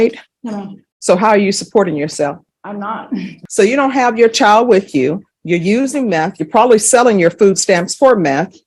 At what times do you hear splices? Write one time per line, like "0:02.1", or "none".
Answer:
0:03.4